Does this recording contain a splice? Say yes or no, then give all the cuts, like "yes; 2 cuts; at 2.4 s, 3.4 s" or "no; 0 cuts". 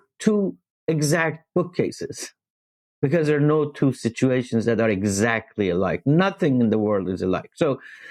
no; 0 cuts